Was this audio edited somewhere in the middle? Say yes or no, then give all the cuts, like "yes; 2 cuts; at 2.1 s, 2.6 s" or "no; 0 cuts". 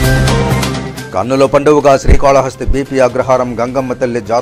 yes; 1 cut; at 0.9 s